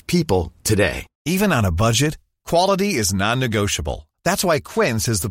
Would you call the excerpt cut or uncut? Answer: cut